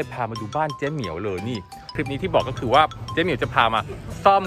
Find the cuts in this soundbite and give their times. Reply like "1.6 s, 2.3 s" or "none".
1.9 s